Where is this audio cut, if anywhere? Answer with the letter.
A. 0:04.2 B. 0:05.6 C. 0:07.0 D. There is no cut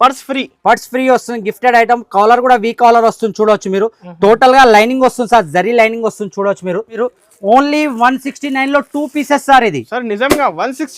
C